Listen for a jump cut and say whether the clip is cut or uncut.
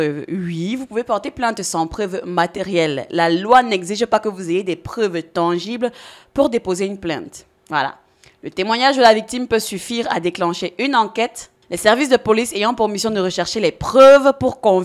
uncut